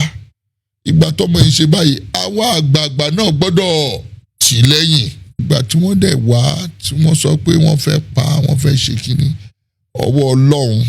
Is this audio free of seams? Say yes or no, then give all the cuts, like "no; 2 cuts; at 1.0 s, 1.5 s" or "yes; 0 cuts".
no; 1 cut; at 5.4 s